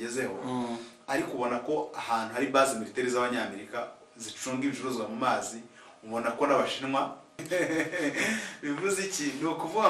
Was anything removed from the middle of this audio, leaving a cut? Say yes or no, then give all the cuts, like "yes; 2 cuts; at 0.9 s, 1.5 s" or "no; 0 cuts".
yes; 1 cut; at 7.3 s